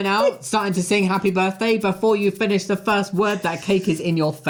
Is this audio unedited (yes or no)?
yes